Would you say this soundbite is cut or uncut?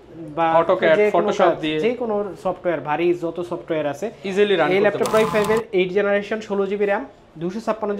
cut